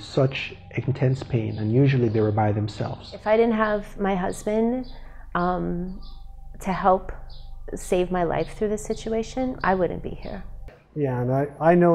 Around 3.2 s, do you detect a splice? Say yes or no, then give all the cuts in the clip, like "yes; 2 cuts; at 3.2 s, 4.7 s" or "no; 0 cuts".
yes; 2 cuts; at 3.2 s, 10.7 s